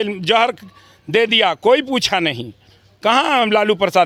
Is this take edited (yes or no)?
no